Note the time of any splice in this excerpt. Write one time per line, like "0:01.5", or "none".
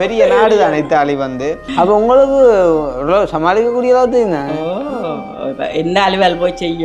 0:01.6

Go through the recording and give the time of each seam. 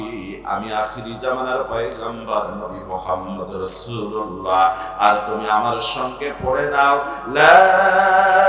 none

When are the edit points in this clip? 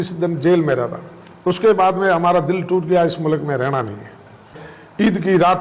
0:04.5

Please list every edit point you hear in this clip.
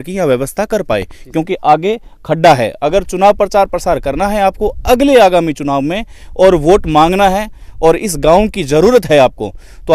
none

